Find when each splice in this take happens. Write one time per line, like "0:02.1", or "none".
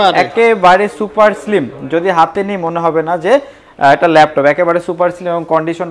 none